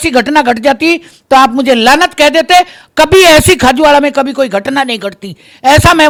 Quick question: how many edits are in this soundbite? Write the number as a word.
zero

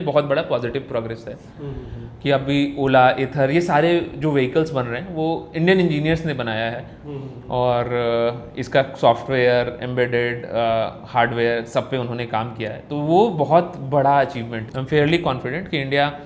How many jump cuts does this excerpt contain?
one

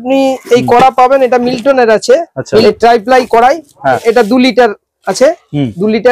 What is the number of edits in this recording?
two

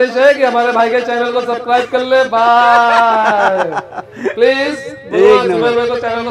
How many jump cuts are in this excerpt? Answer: zero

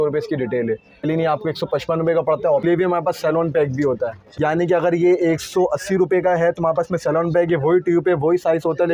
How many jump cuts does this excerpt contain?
three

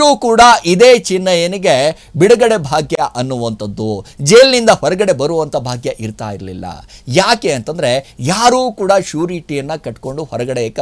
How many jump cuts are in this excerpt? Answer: zero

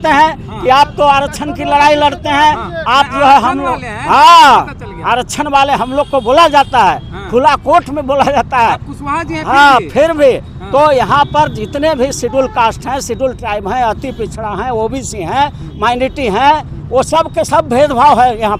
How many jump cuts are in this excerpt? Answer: zero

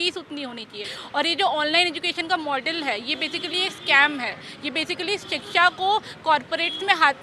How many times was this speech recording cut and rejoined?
one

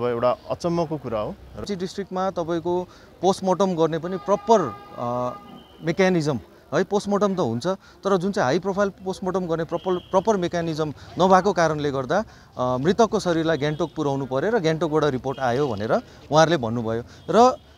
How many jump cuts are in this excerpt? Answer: one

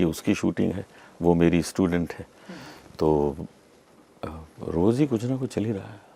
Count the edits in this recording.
zero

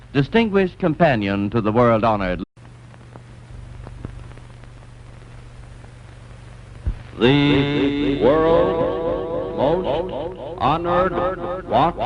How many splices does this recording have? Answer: zero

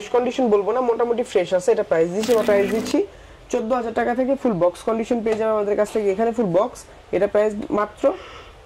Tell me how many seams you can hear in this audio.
one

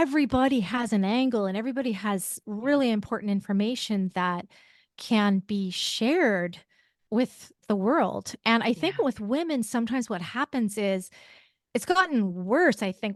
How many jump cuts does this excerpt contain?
zero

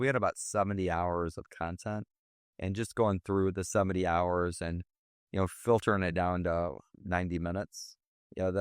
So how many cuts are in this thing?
zero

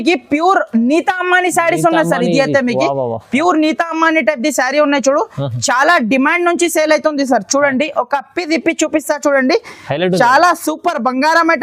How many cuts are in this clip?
zero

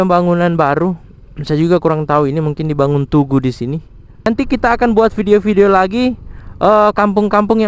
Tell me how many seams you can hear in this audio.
one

